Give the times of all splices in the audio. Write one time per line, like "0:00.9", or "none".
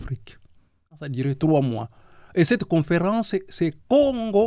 0:01.0